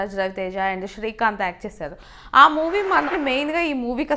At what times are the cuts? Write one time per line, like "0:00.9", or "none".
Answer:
0:03.1